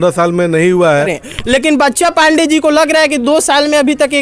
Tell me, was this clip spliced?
yes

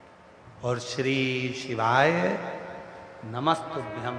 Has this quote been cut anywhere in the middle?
no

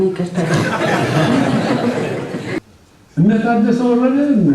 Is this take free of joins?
no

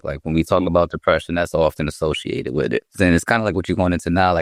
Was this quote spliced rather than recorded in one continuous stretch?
no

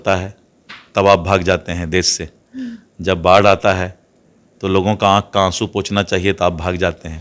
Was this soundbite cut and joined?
no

